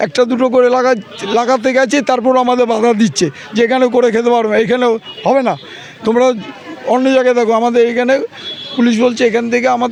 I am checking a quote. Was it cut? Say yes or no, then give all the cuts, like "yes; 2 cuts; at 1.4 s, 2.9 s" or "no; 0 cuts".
no; 0 cuts